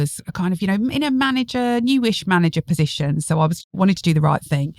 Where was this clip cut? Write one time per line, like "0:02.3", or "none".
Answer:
0:03.6